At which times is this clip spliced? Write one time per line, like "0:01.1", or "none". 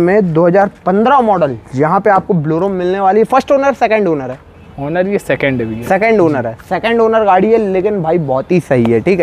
none